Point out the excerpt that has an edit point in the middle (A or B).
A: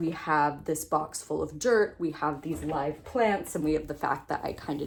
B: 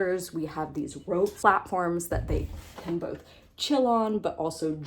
B